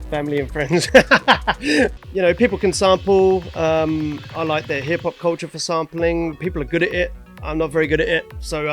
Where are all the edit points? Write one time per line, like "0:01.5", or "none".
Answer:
0:02.0

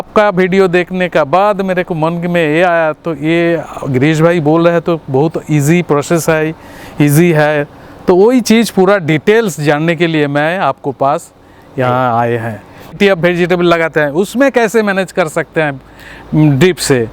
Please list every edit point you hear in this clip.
0:13.0

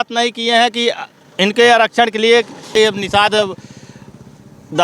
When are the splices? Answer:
0:02.7

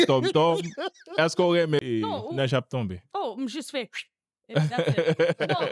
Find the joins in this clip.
0:01.8

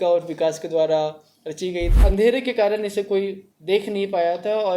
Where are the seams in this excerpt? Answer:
0:01.9

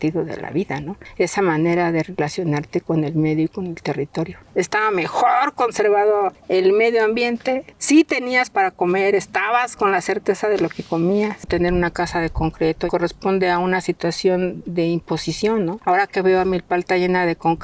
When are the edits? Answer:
0:01.0
0:04.4
0:06.4
0:07.7
0:11.5
0:12.9
0:15.8

